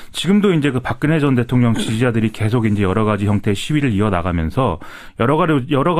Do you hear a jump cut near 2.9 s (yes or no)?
no